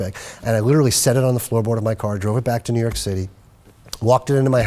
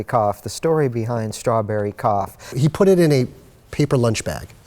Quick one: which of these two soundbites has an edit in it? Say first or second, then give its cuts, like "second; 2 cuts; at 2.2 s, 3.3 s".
second; 1 cut; at 2.5 s